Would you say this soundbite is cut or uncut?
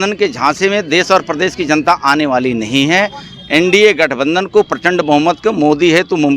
uncut